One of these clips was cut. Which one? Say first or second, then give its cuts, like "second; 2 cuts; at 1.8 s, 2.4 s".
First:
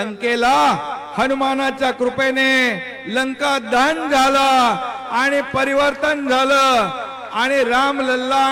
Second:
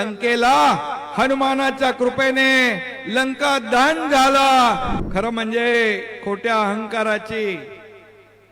second; 1 cut; at 4.9 s